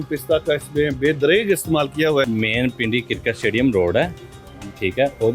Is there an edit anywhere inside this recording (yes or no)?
yes